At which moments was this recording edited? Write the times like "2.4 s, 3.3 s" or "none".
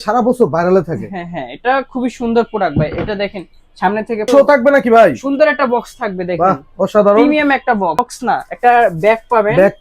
4.2 s

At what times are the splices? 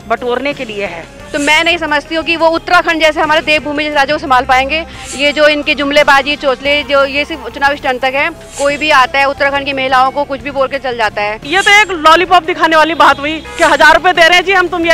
1.2 s, 8.4 s, 11.5 s, 13.4 s

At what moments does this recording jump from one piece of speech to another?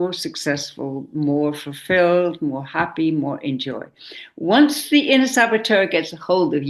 none

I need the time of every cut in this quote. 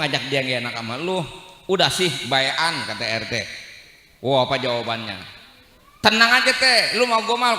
none

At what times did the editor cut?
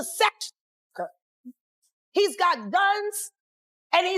none

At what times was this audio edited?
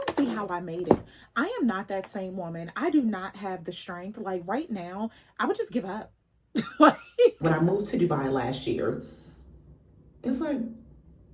7.4 s

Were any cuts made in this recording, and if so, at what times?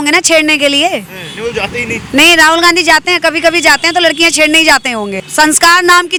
none

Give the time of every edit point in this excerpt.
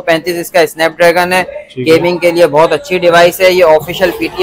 none

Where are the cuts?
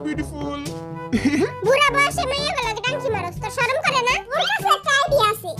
4.3 s

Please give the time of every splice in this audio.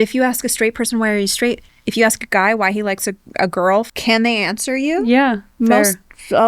1.7 s, 3.9 s

